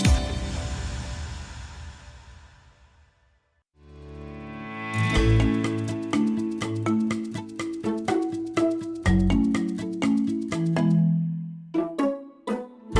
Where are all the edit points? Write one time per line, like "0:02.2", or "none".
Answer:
none